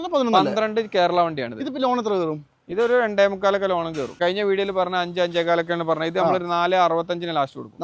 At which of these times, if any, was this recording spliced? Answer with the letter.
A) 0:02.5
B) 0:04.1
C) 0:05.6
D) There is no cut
B